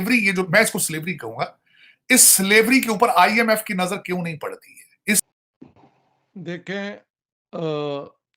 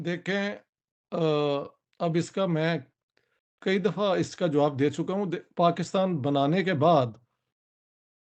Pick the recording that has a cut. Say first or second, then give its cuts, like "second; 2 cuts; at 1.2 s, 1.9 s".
first; 1 cut; at 5.3 s